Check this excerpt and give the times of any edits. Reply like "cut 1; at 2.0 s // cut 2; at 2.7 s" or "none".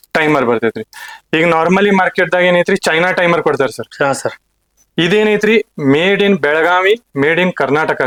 none